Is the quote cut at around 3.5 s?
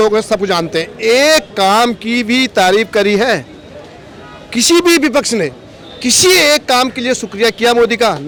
no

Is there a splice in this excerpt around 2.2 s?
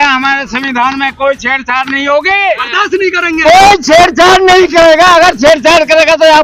no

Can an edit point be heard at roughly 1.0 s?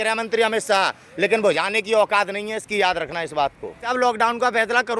no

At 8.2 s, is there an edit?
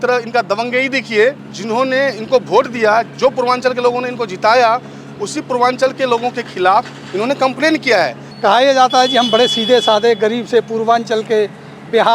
yes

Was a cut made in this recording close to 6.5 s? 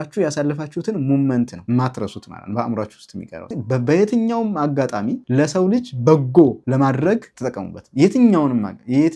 no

